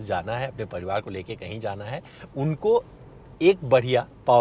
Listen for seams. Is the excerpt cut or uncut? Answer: uncut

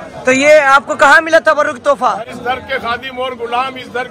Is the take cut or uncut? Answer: cut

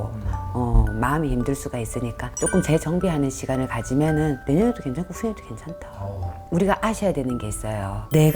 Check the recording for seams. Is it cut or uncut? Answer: cut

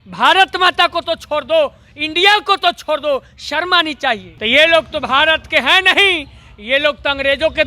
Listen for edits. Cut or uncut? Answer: cut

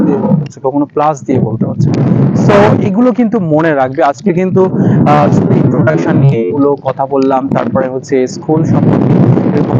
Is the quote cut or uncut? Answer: uncut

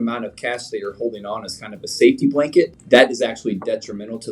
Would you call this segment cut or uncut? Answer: cut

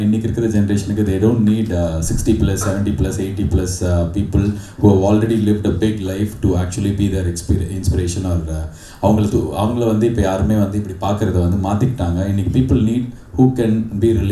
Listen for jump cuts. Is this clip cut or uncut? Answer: uncut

